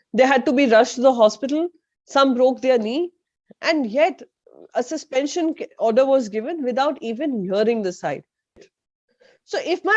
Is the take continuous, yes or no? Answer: no